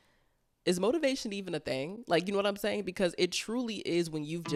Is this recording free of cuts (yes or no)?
yes